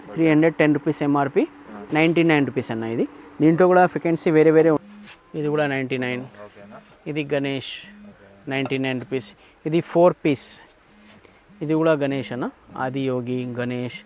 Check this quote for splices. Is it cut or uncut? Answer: cut